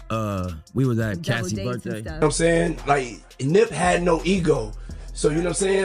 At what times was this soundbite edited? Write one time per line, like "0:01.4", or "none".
0:02.2